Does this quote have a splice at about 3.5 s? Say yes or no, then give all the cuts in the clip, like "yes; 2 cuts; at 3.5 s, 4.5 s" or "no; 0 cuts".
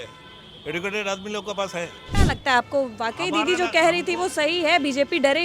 no; 1 cut; at 2.0 s